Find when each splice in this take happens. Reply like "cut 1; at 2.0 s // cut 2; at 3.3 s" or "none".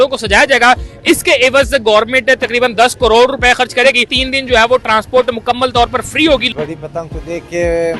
cut 1; at 4.1 s // cut 2; at 6.5 s